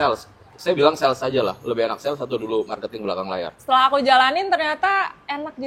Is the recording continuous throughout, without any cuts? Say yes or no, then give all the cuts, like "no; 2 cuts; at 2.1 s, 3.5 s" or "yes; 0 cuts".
no; 1 cut; at 3.5 s